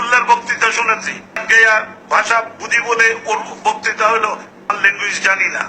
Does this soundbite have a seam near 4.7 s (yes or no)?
yes